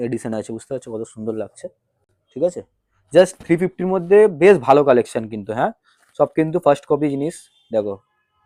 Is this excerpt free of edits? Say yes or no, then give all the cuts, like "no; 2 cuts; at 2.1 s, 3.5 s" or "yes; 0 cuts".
yes; 0 cuts